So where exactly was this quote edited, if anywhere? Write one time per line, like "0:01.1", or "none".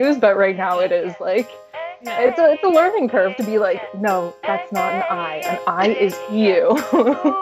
none